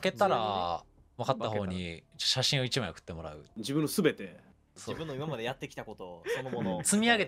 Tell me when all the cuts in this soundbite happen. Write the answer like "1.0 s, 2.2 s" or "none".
3.5 s, 4.7 s